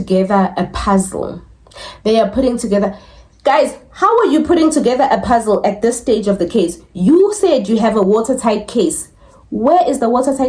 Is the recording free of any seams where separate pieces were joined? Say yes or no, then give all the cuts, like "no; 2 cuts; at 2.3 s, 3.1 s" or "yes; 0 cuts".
yes; 0 cuts